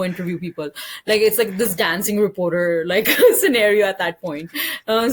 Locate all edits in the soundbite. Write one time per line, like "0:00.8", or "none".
none

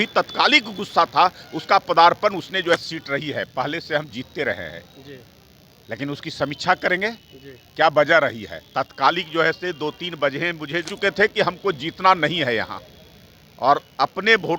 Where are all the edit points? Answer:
0:02.7
0:10.9

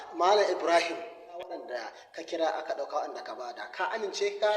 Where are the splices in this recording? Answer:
0:01.4

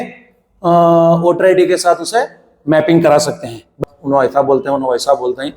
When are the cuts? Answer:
0:03.8

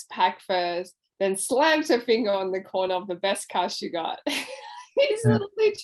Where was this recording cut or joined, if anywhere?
none

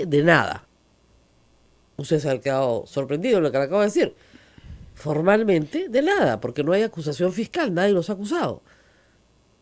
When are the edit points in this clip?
none

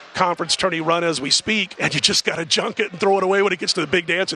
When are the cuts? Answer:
0:01.7

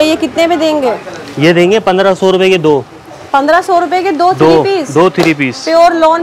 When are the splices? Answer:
none

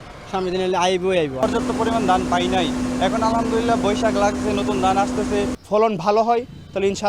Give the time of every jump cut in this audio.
0:01.4
0:05.6

